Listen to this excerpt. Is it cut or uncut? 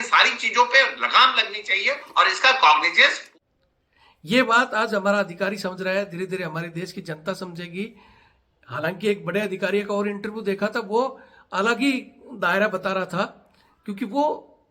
cut